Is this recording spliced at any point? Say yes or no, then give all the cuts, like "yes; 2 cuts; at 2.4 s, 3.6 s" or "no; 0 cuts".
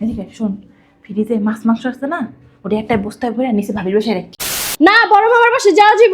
yes; 1 cut; at 4.7 s